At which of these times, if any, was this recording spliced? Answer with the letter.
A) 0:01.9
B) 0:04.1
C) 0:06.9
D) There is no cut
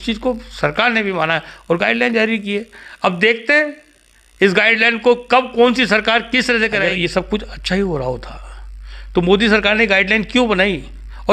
C